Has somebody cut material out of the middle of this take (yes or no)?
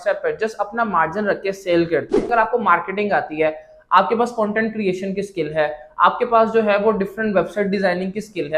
yes